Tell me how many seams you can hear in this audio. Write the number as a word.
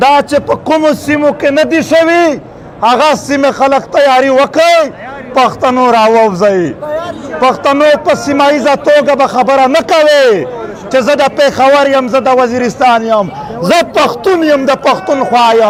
zero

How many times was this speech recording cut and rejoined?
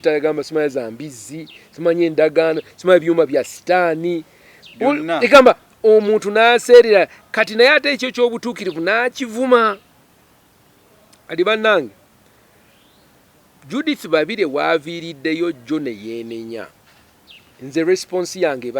zero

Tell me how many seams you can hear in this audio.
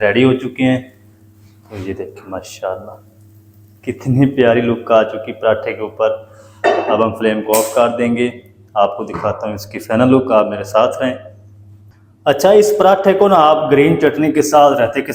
zero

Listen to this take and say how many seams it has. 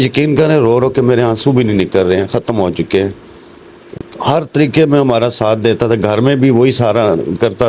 zero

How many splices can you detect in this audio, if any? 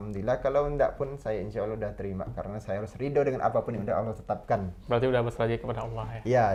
zero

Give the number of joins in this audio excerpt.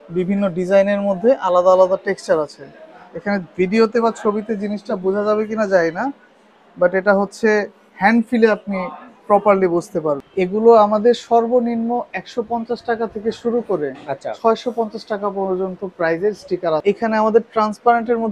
two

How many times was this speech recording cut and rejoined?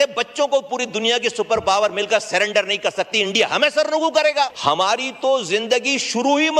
one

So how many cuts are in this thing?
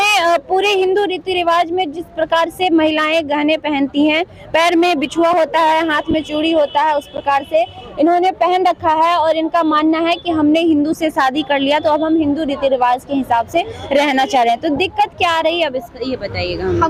zero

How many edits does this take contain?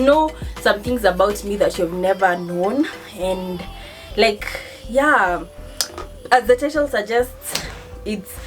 zero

